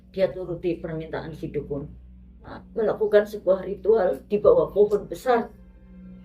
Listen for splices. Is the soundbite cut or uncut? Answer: cut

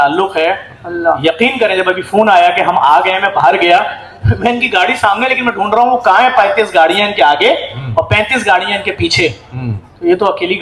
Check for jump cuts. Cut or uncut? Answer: uncut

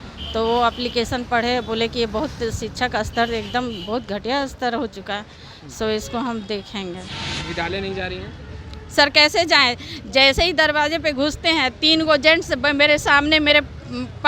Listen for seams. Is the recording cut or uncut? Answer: cut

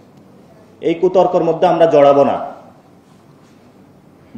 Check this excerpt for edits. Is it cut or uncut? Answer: uncut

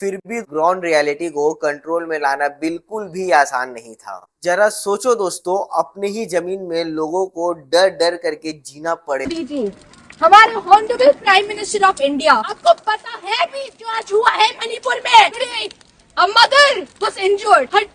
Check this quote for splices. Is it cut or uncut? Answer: uncut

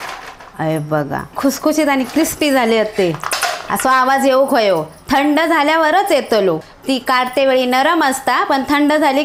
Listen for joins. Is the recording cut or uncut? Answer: cut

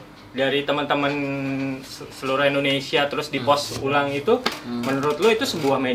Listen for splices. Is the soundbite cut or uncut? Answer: uncut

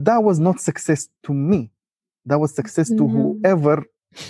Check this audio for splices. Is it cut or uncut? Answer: uncut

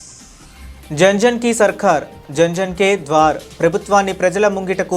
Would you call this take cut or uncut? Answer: cut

